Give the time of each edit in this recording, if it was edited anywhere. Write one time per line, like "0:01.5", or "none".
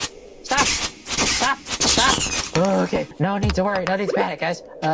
0:03.1